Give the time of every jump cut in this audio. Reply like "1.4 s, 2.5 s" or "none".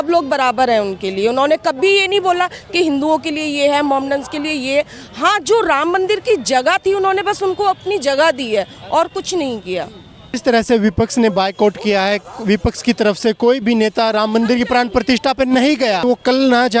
10.2 s, 16.0 s